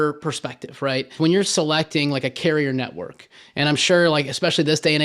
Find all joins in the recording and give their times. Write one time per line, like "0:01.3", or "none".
0:01.1